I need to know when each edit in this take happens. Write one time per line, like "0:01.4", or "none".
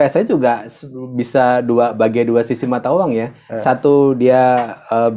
none

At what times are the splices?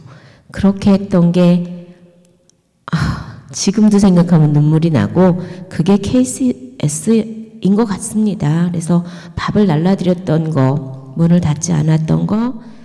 none

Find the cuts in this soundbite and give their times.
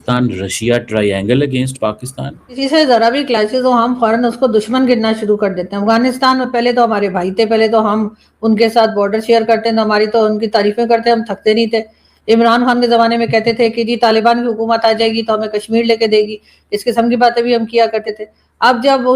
0:02.5

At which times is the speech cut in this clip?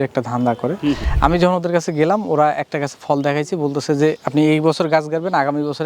0:01.1

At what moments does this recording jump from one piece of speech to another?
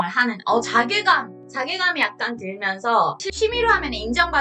0:03.2

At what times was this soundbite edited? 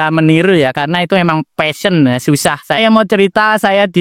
0:02.8

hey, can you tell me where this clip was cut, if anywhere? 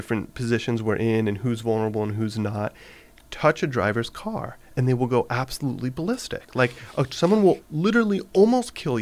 0:07.6

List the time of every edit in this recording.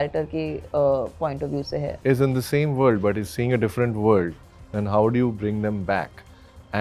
0:01.9

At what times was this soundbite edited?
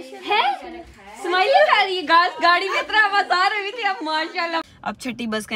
0:04.6

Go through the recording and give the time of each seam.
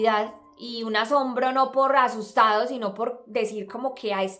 none

